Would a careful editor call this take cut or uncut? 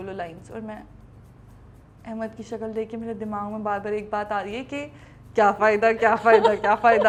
uncut